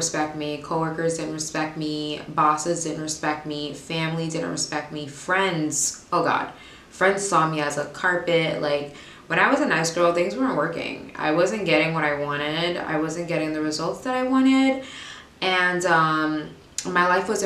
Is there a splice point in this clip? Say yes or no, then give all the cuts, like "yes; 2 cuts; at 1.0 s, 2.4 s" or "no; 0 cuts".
no; 0 cuts